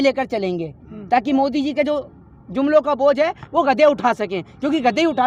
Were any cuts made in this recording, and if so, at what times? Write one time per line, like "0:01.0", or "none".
none